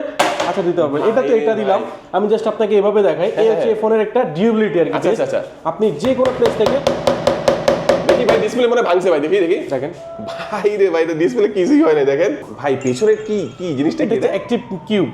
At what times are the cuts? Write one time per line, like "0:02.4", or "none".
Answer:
0:12.5